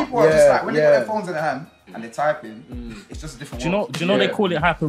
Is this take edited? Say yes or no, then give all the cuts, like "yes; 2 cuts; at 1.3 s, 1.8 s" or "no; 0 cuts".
no; 0 cuts